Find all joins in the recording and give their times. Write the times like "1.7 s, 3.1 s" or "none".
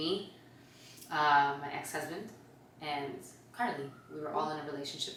none